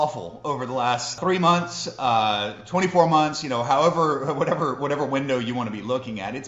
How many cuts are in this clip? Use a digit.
1